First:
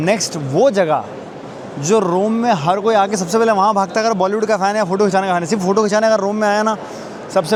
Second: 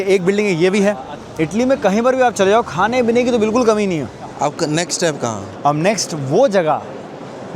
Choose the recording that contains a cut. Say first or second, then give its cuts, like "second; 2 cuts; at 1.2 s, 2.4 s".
second; 2 cuts; at 1.2 s, 4.3 s